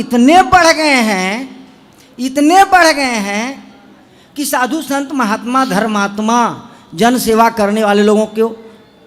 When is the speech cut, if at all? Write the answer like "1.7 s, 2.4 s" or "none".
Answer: none